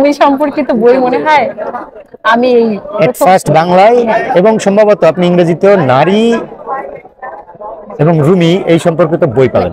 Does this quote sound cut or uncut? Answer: uncut